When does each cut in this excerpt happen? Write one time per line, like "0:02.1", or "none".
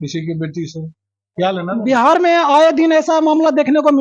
none